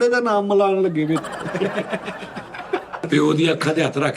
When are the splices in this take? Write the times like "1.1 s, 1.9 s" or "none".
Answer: 1.4 s, 3.0 s